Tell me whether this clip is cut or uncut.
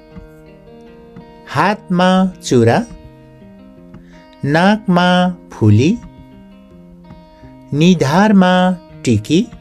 uncut